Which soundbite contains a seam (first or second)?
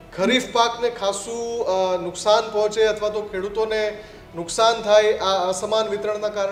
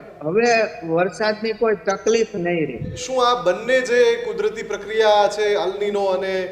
second